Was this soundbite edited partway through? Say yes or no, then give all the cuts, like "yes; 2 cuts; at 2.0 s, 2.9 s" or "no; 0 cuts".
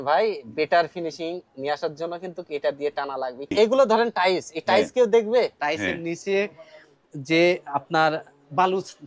yes; 2 cuts; at 3.5 s, 5.6 s